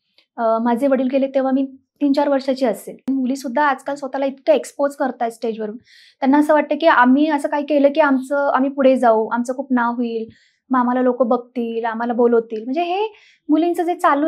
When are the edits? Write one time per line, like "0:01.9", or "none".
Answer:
0:02.9

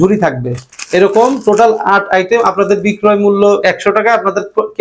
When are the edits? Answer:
none

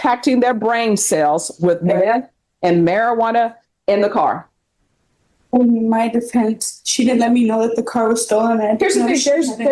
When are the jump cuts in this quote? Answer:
none

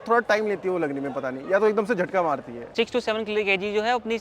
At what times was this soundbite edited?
0:02.7

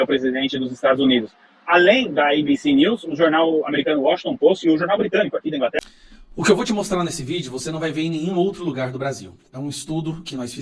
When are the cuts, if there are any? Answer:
0:05.8

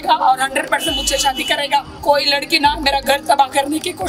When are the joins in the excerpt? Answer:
0:01.9

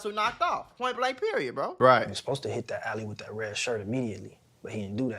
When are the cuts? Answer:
0:01.7

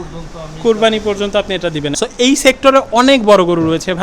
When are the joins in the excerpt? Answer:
0:01.9

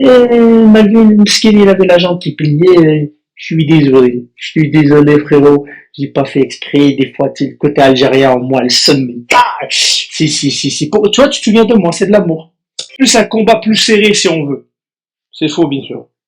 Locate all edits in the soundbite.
0:12.8

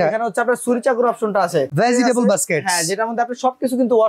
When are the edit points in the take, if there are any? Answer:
0:01.7

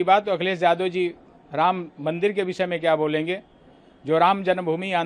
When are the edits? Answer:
none

